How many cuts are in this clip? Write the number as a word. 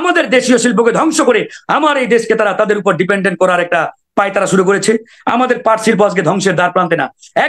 zero